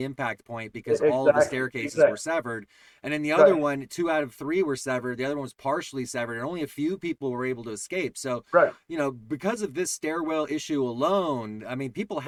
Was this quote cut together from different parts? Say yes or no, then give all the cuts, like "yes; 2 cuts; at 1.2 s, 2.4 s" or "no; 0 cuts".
no; 0 cuts